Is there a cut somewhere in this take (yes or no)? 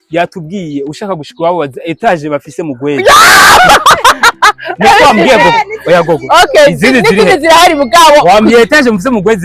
no